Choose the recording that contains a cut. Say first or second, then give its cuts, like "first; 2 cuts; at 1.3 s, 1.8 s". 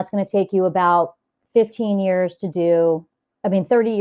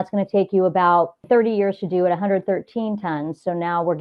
second; 1 cut; at 1.2 s